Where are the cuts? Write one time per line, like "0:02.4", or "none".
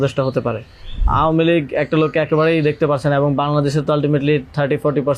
0:01.0